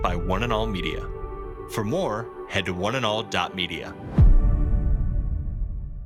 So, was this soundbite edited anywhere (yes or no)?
no